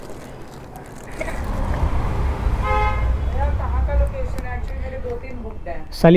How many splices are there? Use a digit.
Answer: 1